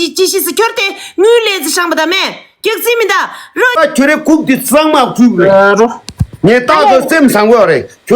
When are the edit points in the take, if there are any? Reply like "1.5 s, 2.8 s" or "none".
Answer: 3.8 s